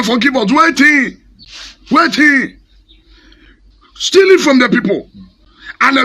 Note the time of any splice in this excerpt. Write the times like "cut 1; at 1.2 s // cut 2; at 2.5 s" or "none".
cut 1; at 3.6 s